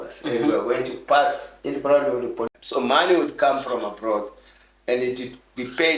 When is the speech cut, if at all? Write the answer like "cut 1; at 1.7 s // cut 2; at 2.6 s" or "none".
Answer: cut 1; at 2.5 s